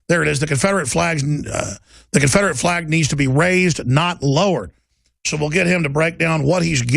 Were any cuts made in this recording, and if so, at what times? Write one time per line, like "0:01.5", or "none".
0:05.5